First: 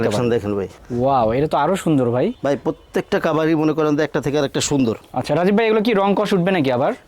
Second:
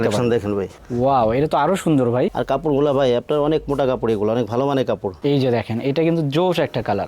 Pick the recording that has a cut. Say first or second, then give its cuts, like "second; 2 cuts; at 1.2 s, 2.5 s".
second; 2 cuts; at 2.3 s, 5.1 s